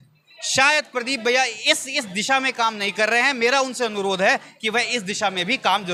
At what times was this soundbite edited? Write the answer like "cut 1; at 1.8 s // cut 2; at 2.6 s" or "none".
none